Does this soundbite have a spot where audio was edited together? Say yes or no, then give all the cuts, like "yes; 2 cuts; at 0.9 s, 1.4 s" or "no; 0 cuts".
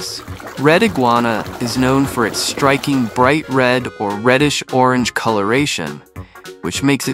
no; 0 cuts